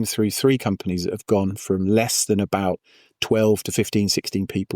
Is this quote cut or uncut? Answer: uncut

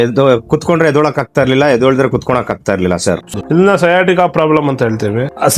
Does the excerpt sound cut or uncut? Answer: cut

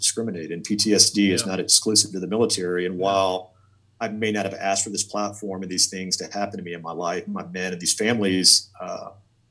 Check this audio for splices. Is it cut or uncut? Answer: uncut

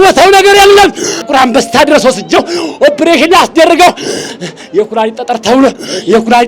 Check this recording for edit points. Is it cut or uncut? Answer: cut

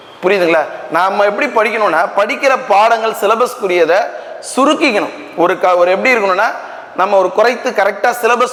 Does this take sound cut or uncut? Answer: uncut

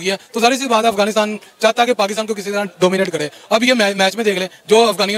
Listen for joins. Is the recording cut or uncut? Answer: uncut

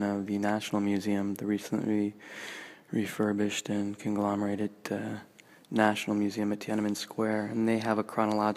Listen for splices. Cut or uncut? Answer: uncut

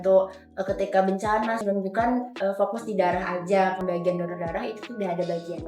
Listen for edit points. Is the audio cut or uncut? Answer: cut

